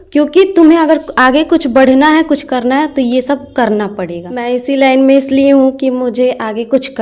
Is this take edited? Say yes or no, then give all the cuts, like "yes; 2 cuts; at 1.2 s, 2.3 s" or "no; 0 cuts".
yes; 1 cut; at 4.3 s